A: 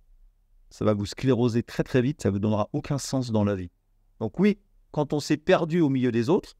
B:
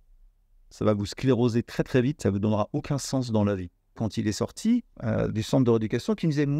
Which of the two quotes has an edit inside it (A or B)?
B